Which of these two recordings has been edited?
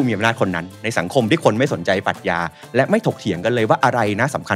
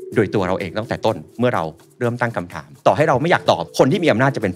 second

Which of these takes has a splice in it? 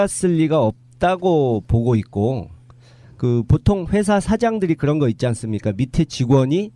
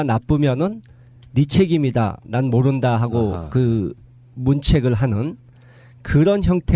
first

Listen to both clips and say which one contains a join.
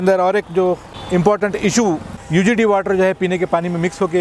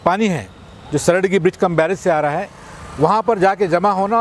first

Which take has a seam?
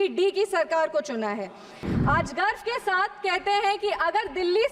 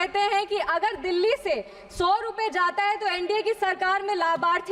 first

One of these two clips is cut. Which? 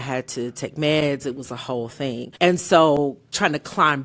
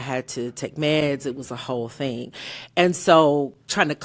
first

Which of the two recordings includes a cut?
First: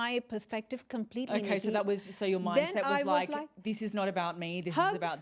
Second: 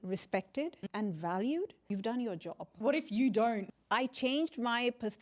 second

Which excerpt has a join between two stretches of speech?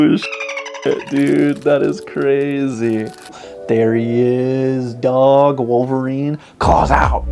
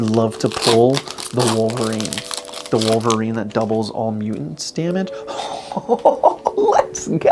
first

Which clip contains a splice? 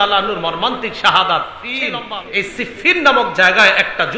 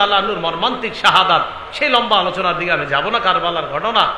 first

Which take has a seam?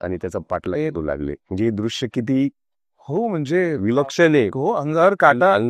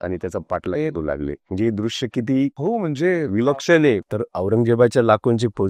second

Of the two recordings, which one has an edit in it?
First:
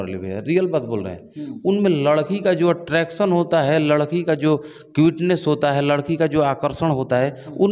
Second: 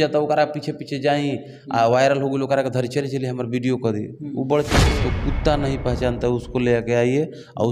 second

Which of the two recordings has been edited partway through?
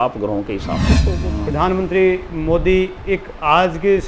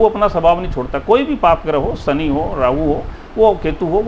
first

